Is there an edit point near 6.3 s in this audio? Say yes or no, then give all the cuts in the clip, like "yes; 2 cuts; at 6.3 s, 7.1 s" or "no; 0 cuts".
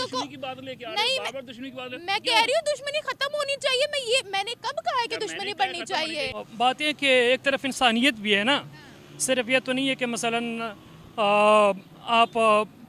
yes; 1 cut; at 6.3 s